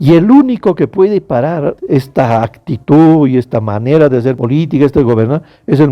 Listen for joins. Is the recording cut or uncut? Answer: cut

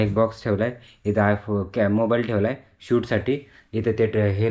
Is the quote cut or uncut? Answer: uncut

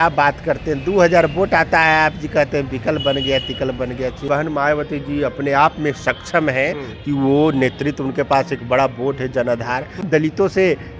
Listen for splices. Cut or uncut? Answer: cut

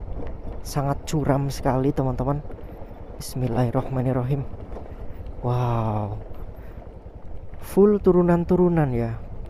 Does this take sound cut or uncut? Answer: uncut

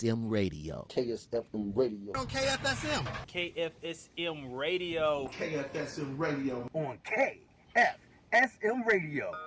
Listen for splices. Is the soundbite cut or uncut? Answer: cut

